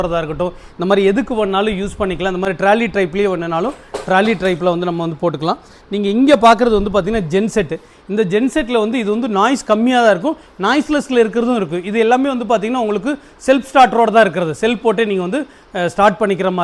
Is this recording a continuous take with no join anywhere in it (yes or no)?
yes